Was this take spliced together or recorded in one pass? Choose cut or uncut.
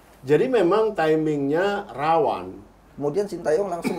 cut